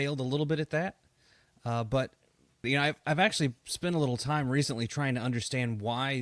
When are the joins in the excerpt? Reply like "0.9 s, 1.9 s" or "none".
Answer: 2.7 s